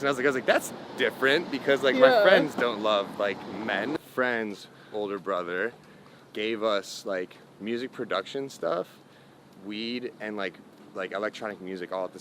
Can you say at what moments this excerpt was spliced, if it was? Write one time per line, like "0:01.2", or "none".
0:04.0